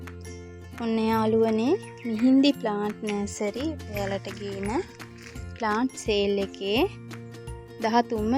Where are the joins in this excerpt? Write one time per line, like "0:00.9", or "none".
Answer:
none